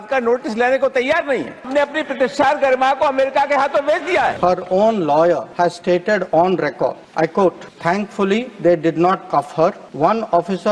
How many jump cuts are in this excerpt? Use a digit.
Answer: 6